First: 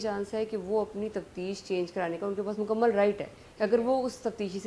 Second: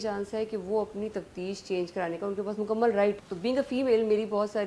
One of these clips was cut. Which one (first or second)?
second